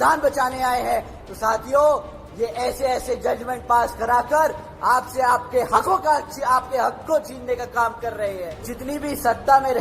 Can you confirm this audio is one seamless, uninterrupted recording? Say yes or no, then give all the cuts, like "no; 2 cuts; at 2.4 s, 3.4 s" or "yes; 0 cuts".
no; 1 cut; at 8.7 s